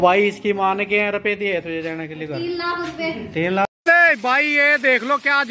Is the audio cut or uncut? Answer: cut